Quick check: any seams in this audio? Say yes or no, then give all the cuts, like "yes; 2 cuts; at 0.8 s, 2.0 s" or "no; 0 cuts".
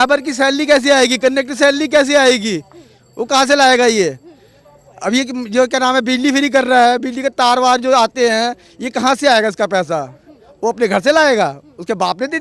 no; 0 cuts